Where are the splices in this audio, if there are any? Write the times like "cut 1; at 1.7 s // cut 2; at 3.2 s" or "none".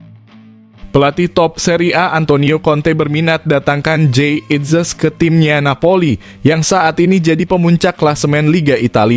cut 1; at 0.9 s